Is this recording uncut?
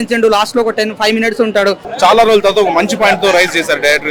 no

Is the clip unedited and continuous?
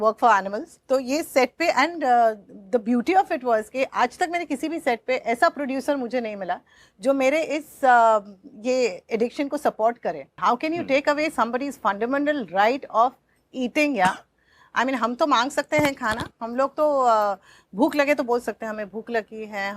no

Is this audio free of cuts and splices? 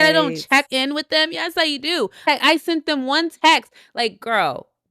yes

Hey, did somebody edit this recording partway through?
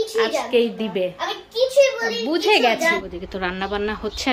yes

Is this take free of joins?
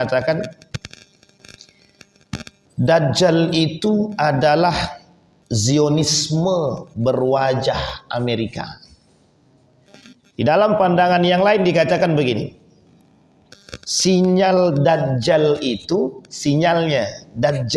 yes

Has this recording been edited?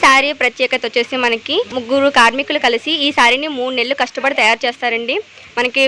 yes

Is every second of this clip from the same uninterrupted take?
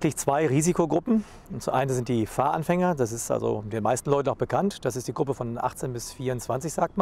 yes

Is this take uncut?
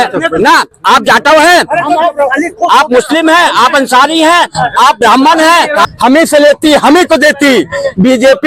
no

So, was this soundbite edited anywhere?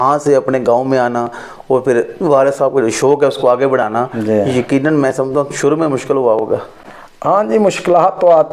no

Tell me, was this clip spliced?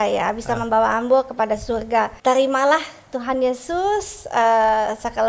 yes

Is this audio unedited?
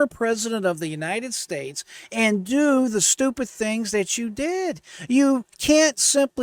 yes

